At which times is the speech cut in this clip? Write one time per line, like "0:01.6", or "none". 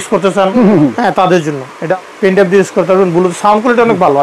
0:01.9